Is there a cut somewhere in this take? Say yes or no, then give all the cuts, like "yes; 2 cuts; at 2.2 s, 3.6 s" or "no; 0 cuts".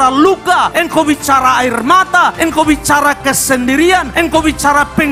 no; 0 cuts